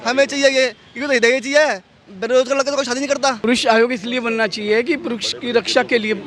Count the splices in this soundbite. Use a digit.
1